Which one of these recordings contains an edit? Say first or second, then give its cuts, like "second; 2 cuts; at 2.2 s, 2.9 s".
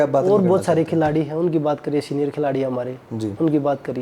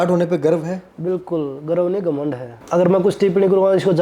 second; 1 cut; at 2.5 s